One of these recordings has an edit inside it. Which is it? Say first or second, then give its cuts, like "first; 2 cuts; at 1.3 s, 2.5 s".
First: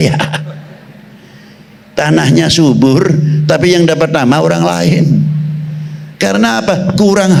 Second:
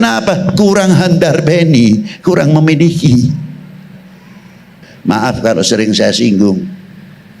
second; 1 cut; at 4.8 s